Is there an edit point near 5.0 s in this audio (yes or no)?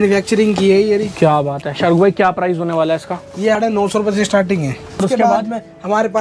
yes